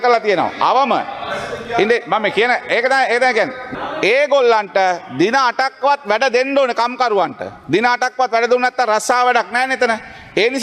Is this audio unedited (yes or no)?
no